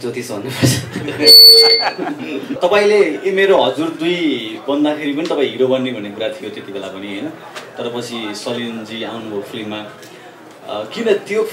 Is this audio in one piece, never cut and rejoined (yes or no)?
no